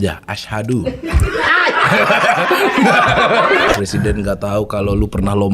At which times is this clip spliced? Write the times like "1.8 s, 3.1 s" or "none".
3.7 s